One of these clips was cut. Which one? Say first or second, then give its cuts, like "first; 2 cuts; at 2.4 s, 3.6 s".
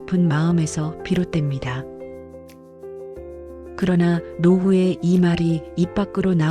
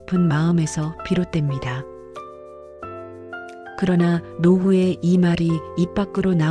first; 2 cuts; at 2.5 s, 3.8 s